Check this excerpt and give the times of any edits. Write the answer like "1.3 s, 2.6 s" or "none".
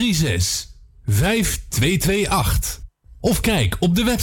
none